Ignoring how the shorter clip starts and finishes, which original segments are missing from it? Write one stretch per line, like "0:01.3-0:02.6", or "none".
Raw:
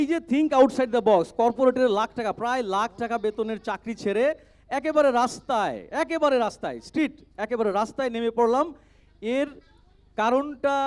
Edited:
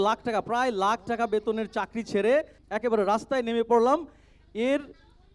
0:04.5-0:07.3